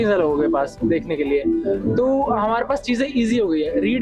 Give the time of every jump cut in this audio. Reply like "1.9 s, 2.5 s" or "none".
none